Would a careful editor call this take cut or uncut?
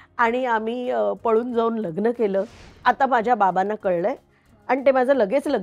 cut